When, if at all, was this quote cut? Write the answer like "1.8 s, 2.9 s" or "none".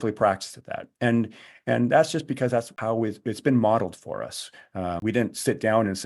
2.7 s, 5.0 s

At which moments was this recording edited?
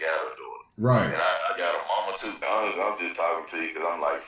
2.4 s

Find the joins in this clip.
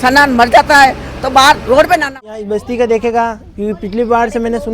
2.2 s

